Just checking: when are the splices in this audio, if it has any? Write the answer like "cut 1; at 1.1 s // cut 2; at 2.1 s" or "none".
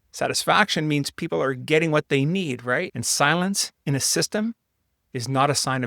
cut 1; at 3.0 s